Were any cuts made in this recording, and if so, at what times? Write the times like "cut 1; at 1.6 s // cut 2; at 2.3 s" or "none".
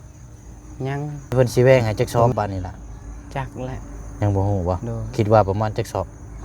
cut 1; at 1.3 s